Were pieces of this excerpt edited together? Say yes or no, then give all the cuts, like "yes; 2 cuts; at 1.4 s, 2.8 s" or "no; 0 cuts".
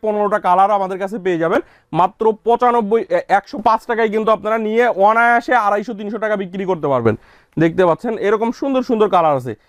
no; 0 cuts